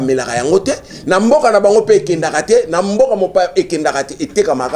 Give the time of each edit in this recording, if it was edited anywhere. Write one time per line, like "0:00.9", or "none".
none